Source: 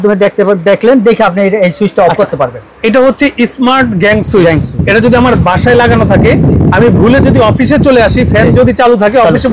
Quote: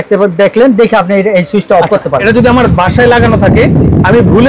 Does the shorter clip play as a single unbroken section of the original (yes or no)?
no